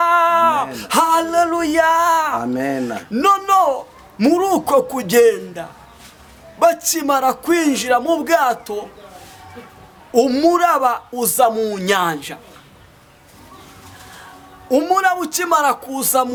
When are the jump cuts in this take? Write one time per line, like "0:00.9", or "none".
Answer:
none